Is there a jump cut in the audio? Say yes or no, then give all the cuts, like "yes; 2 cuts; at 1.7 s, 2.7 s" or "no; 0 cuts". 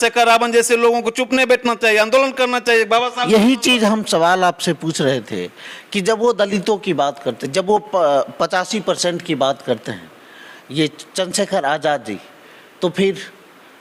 no; 0 cuts